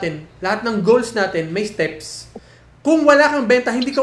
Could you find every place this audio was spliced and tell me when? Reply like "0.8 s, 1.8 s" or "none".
none